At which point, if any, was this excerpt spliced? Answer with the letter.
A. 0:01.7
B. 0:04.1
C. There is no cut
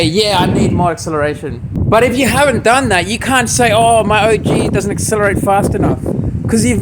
A